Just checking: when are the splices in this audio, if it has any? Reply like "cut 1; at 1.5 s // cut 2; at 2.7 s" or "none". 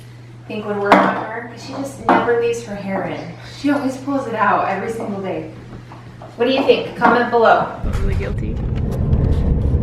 none